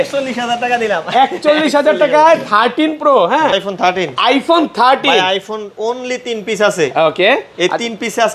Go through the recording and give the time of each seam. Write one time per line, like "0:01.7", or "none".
0:03.5